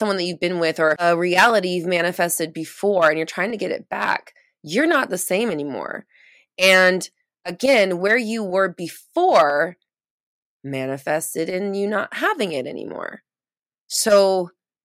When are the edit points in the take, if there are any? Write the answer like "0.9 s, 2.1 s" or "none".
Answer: 1.0 s